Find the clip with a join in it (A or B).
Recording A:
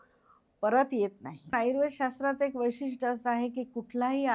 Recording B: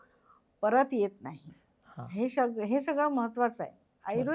A